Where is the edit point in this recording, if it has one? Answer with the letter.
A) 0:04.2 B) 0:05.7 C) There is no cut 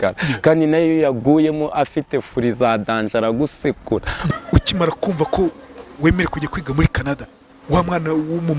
A